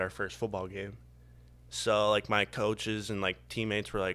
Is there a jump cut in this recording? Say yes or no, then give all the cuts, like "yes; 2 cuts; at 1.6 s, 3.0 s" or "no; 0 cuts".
no; 0 cuts